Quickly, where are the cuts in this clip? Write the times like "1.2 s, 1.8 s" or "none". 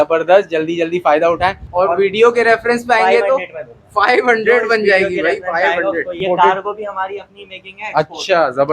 1.6 s, 6.2 s